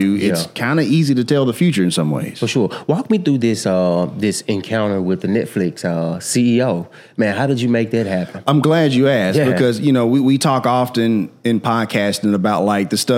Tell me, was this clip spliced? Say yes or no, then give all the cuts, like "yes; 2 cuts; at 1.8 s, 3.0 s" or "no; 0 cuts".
no; 0 cuts